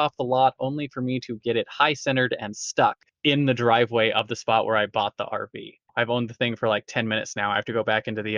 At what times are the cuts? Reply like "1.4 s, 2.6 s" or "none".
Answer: 3.1 s, 5.8 s